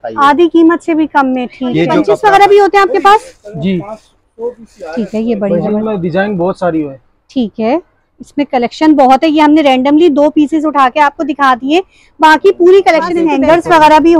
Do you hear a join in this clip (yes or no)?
yes